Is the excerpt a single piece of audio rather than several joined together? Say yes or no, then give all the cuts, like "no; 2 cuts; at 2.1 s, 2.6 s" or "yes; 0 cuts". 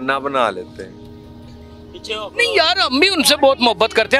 yes; 0 cuts